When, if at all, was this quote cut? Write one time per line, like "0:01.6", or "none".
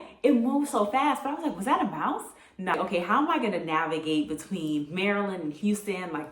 0:02.7